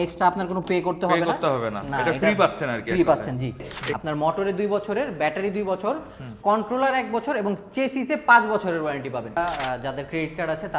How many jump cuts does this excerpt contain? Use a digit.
2